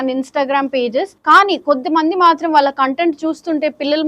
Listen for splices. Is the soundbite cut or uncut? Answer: cut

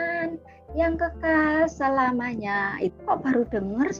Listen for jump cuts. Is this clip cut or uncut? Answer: cut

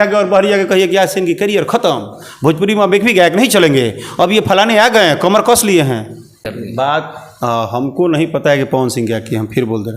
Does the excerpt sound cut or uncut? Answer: cut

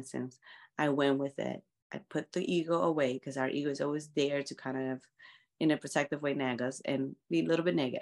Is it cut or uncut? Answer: uncut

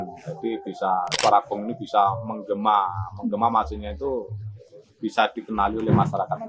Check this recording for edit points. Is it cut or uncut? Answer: cut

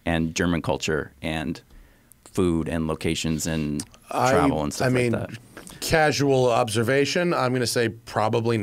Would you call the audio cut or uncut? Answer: uncut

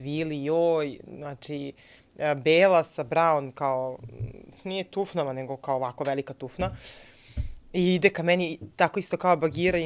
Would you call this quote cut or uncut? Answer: uncut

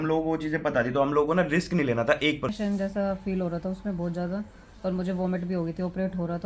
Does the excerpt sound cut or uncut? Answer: cut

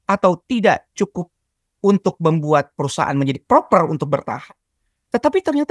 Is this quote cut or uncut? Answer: uncut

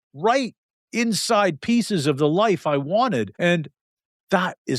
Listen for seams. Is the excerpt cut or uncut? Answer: cut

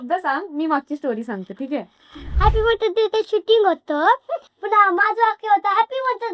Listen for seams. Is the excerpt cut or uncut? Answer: cut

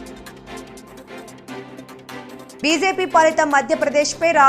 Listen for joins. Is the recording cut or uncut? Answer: cut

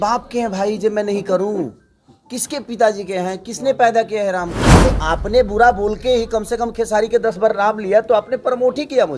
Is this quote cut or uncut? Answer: cut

